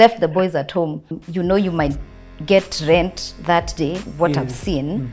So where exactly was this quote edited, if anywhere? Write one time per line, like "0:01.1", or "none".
0:01.1
0:04.0